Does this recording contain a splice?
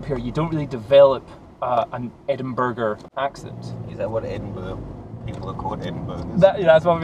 no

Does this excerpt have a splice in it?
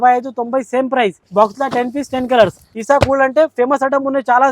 yes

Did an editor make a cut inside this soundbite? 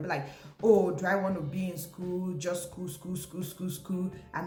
no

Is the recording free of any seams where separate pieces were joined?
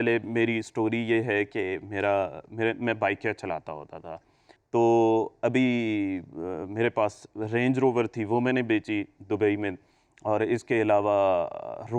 yes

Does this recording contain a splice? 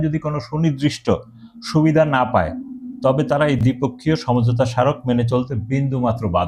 no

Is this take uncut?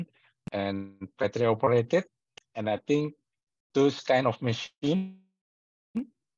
yes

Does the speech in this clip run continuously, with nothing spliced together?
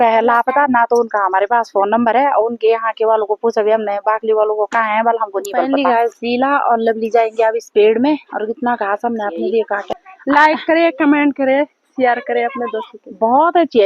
no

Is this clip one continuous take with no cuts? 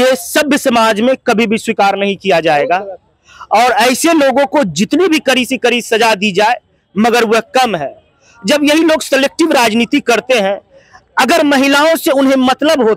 yes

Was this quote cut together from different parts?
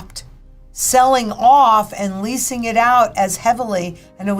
no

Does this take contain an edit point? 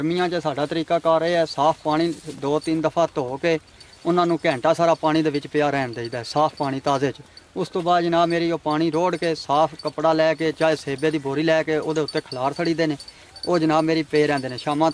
no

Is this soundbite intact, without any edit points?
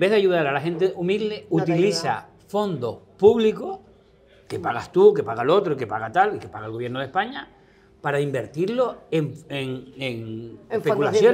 yes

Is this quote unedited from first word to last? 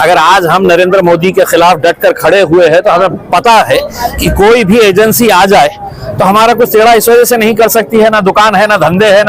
yes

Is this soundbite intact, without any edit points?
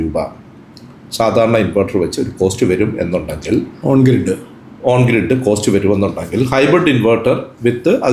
yes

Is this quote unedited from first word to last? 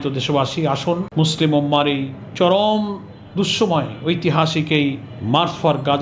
no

